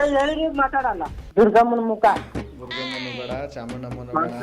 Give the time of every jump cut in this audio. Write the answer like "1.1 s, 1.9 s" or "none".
1.1 s